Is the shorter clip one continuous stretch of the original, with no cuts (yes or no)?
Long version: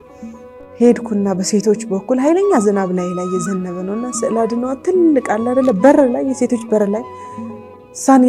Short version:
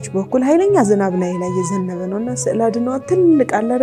yes